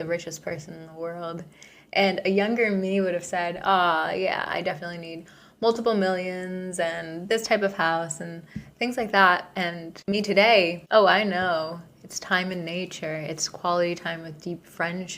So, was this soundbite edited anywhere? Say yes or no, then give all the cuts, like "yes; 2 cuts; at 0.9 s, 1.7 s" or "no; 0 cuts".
yes; 1 cut; at 10.0 s